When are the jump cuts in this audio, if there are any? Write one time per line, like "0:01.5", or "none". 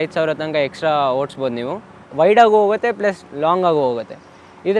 0:02.0